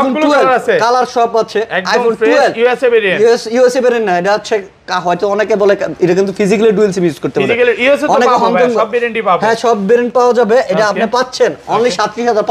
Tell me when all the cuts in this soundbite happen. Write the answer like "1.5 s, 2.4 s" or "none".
none